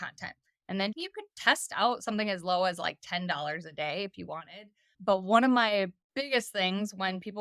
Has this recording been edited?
yes; 3 cuts; at 1.0 s, 4.9 s, 6.0 s

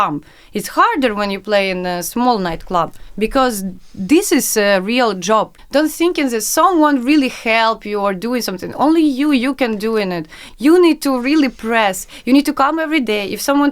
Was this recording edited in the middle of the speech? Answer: yes; 2 cuts; at 5.6 s, 10.4 s

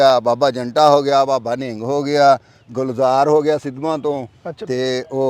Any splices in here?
no; 0 cuts

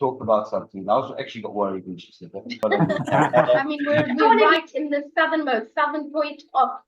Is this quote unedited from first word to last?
no; 1 cut; at 4.6 s

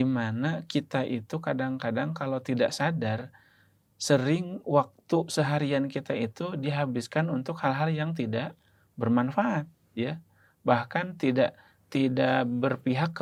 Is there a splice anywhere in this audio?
no; 0 cuts

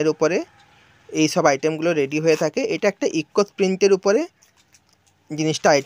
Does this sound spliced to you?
no; 0 cuts

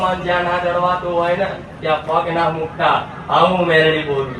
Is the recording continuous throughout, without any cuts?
yes; 0 cuts

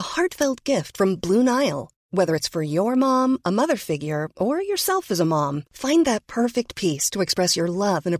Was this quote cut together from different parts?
no; 0 cuts

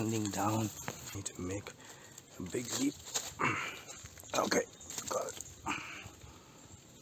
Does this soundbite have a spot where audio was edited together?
yes; 1 cut; at 1.2 s

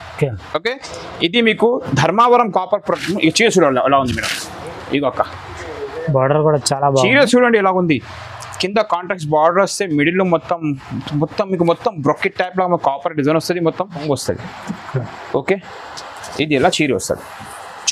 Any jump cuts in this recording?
yes; 1 cut; at 14.0 s

